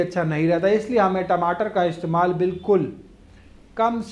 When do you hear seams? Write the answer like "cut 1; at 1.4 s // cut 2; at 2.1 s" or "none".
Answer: none